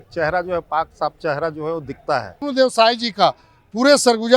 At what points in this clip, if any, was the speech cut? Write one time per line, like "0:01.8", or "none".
0:02.4